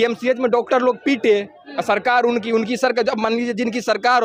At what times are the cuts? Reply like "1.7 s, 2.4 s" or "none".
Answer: none